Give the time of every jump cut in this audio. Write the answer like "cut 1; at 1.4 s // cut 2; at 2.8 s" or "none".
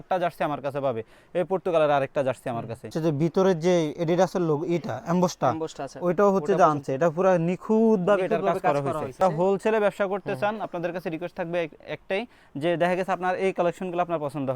cut 1; at 2.9 s // cut 2; at 9.2 s